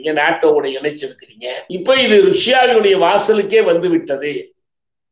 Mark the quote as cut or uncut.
uncut